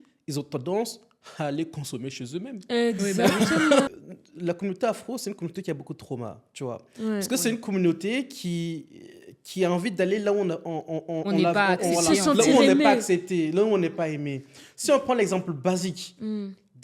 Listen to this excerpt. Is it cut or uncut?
cut